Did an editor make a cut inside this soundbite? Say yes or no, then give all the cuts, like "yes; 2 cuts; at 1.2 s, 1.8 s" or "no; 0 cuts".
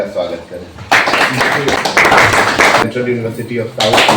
yes; 2 cuts; at 1.8 s, 2.8 s